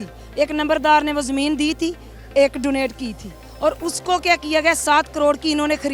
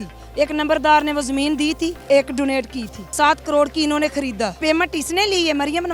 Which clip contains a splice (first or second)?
second